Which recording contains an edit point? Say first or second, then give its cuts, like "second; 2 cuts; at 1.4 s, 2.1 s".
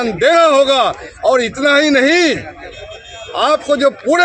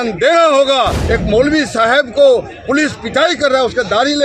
second; 1 cut; at 1.0 s